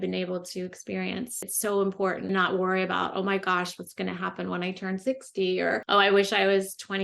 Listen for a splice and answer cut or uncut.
cut